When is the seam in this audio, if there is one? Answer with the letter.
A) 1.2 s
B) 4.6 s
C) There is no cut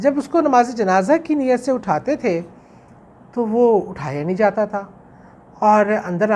C